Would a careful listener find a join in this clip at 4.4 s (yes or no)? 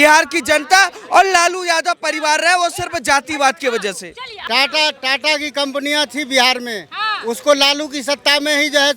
yes